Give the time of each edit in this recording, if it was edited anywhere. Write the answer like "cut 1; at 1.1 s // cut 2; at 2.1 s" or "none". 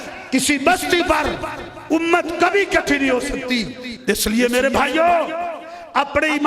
none